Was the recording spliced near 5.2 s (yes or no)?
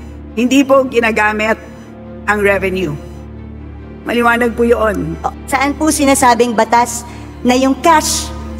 yes